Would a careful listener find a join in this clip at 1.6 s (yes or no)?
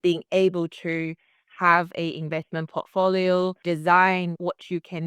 no